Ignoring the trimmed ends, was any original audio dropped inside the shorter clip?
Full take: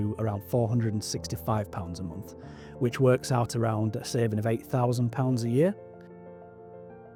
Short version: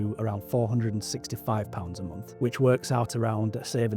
yes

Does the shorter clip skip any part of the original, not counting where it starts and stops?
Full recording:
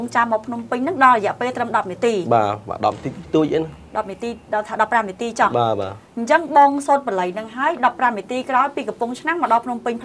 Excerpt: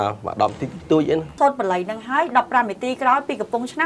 yes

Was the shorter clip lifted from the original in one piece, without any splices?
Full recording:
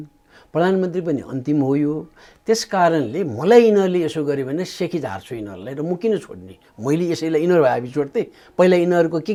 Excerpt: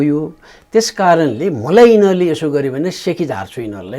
yes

